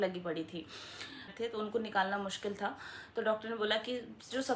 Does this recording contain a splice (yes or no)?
yes